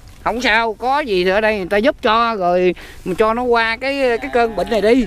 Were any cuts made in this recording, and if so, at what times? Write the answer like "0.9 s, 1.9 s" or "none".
none